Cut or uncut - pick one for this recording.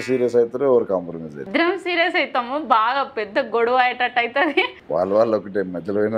cut